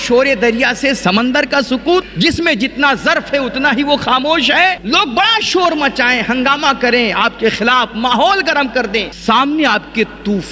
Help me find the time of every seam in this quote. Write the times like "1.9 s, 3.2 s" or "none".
2.1 s, 4.8 s, 9.1 s